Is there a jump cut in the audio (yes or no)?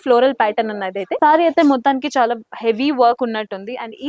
yes